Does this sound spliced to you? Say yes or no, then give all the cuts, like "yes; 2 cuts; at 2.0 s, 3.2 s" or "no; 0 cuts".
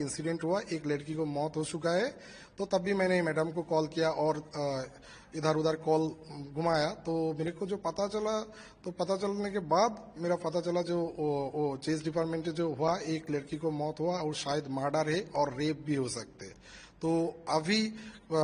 no; 0 cuts